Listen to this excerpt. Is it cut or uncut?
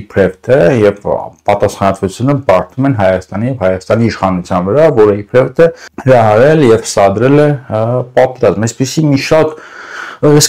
cut